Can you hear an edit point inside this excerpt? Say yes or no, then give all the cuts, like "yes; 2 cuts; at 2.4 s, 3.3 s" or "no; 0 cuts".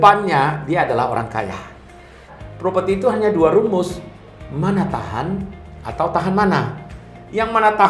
yes; 1 cut; at 2.3 s